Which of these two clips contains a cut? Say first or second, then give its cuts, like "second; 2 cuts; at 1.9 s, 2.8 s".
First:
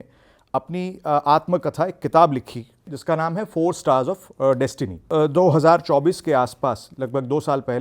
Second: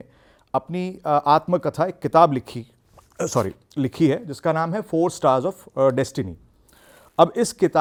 first; 2 cuts; at 2.9 s, 4.9 s